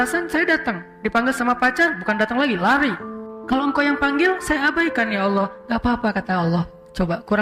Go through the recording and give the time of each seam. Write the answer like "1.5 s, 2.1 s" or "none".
none